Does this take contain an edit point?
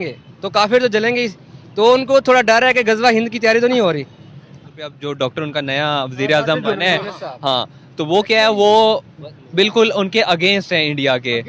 yes; 1 cut; at 4.9 s

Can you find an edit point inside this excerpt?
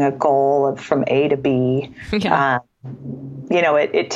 no; 0 cuts

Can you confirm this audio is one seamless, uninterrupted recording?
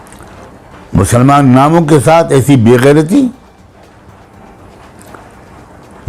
yes; 0 cuts

